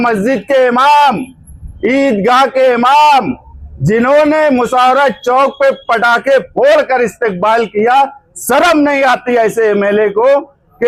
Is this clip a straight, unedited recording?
yes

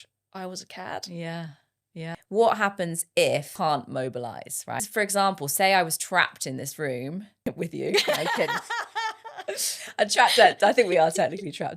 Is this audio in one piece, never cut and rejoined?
no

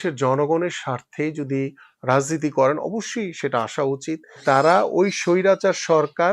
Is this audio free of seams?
no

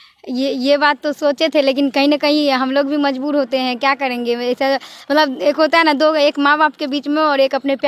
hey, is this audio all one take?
yes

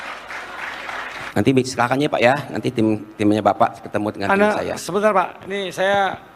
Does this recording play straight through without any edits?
no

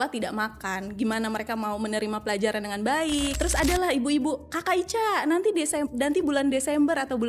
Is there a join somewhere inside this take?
yes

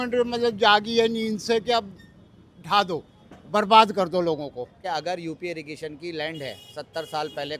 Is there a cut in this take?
yes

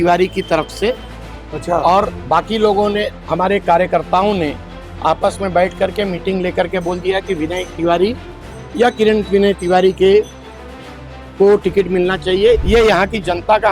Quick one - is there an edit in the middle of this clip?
yes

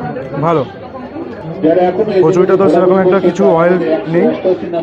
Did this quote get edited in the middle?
yes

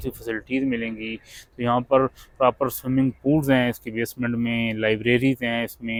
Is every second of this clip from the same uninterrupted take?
yes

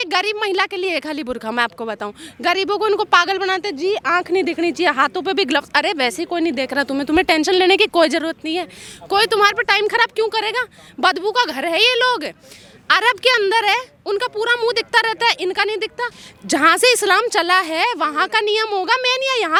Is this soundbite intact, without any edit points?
yes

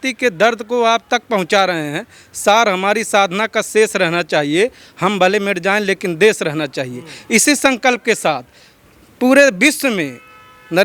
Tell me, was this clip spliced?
no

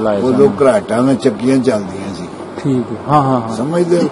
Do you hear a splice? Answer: no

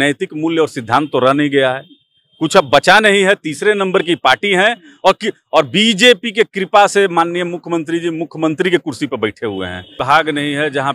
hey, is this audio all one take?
no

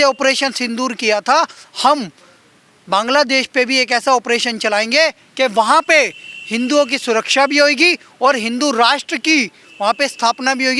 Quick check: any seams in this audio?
no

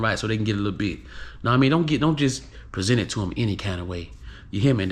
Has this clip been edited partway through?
no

